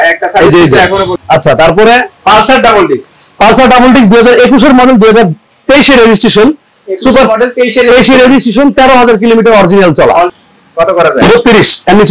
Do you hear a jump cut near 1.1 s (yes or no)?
yes